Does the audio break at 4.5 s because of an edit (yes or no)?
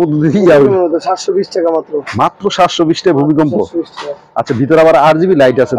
no